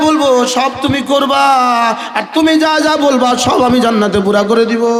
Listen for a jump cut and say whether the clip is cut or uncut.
uncut